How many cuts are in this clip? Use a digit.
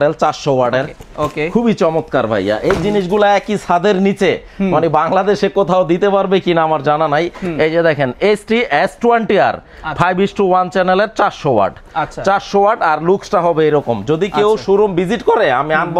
0